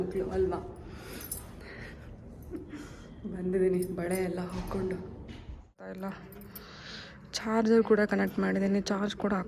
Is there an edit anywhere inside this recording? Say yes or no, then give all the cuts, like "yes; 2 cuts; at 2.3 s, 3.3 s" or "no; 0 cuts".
yes; 1 cut; at 5.8 s